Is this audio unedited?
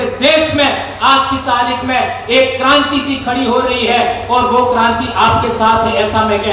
yes; 0 cuts

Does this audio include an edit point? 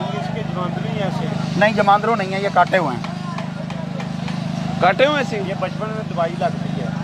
no; 0 cuts

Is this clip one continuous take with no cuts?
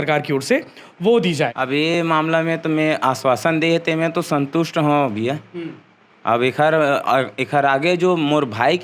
no; 1 cut; at 1.6 s

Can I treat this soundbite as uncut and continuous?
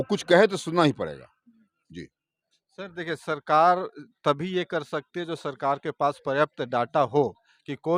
yes; 0 cuts

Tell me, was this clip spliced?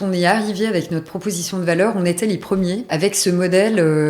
yes; 1 cut; at 2.9 s

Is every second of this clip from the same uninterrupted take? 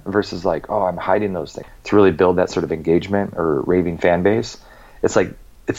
no; 1 cut; at 1.5 s

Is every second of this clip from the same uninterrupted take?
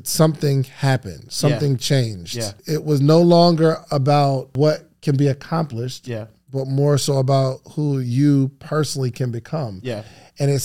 no; 2 cuts; at 2.6 s, 4.5 s

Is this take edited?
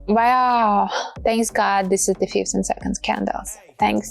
yes; 1 cut; at 1.1 s

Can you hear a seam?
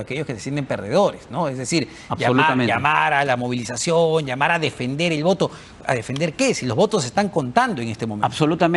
no; 0 cuts

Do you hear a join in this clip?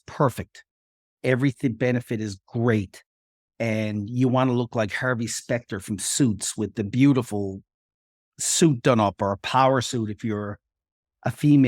no; 0 cuts

